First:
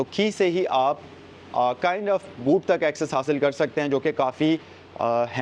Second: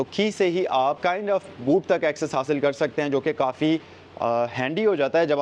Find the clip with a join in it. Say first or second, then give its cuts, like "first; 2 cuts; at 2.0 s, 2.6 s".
second; 1 cut; at 1.0 s